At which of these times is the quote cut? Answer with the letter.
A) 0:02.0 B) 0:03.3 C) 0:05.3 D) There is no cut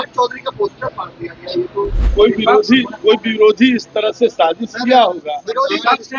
A